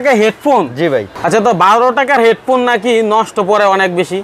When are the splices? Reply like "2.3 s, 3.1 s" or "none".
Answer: none